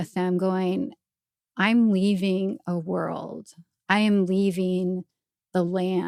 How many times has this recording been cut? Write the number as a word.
zero